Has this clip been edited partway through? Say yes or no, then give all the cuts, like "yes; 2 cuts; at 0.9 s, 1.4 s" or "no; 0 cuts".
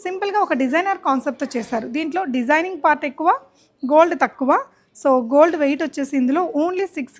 no; 0 cuts